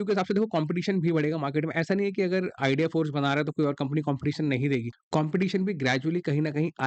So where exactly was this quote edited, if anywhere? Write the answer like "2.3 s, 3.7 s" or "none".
5.0 s